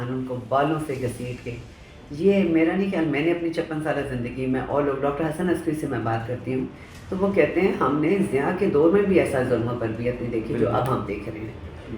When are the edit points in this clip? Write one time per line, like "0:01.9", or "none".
none